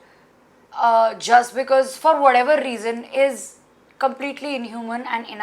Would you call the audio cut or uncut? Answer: uncut